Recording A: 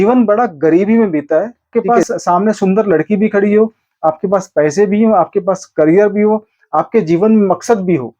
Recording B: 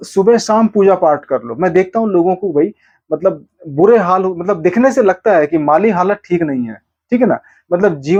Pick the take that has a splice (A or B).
A